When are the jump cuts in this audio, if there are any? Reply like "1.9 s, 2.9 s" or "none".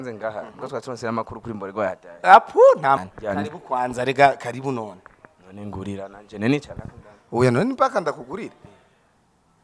3.0 s